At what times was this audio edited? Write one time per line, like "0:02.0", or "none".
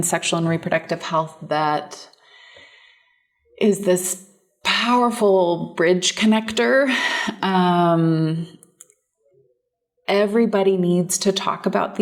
none